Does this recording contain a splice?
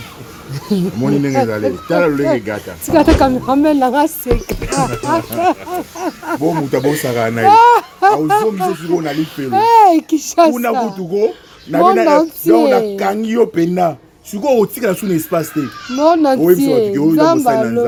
no; 0 cuts

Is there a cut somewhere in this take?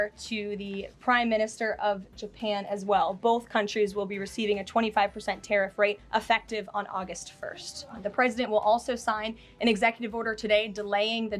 yes; 2 cuts; at 6.0 s, 8.0 s

